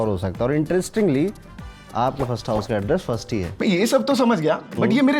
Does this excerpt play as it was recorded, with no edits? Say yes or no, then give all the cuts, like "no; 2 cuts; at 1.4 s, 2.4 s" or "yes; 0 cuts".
no; 1 cut; at 3.5 s